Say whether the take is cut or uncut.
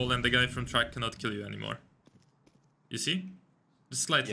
uncut